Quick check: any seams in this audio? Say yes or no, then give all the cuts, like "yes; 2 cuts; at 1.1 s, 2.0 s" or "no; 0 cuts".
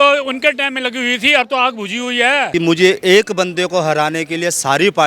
yes; 1 cut; at 2.5 s